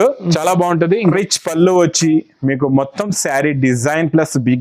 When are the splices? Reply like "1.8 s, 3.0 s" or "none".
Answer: 1.1 s